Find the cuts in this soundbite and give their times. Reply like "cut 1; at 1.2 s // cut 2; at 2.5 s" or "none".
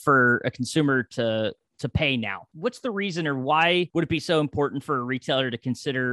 cut 1; at 2.4 s // cut 2; at 3.9 s